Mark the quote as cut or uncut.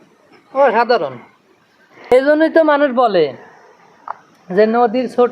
cut